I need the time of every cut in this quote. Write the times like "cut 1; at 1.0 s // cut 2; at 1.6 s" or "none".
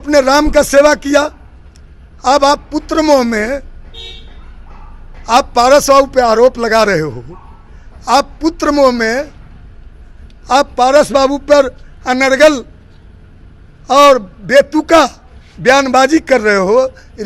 none